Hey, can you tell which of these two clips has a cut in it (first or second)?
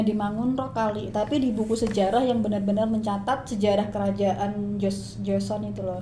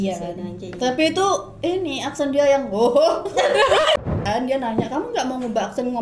second